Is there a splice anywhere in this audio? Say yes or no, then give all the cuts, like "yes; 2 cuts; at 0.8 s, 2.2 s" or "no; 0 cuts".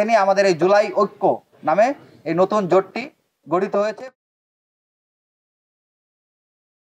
no; 0 cuts